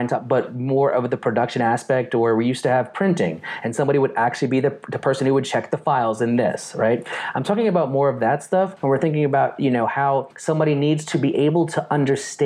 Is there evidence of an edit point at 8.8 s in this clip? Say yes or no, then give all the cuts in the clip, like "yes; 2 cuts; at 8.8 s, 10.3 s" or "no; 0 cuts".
yes; 2 cuts; at 8.8 s, 10.3 s